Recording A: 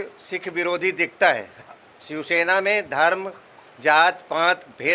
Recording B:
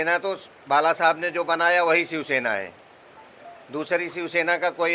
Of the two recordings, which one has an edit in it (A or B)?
A